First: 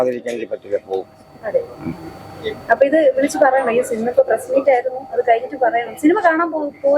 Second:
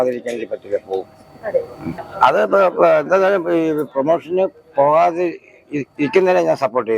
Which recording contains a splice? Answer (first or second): second